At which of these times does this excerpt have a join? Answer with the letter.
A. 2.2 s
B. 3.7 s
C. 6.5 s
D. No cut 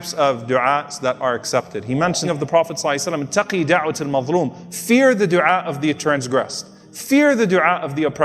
A